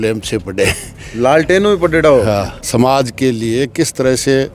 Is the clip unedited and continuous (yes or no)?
no